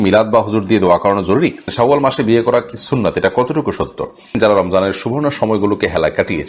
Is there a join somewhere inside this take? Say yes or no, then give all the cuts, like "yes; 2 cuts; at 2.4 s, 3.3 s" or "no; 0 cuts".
yes; 2 cuts; at 1.7 s, 4.4 s